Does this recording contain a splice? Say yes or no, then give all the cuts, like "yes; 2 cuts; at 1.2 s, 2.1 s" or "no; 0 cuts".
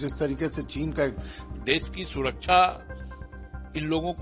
yes; 1 cut; at 1.5 s